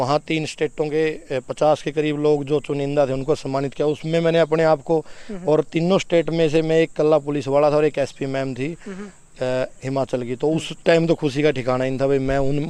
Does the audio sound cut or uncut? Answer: uncut